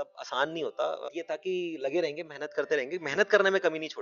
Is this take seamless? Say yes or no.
no